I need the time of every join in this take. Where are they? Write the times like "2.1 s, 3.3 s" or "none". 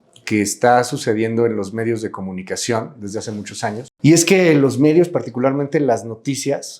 3.9 s